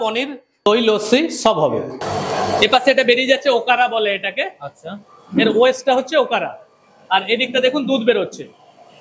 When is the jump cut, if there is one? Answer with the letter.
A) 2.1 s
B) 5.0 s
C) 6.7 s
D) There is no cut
A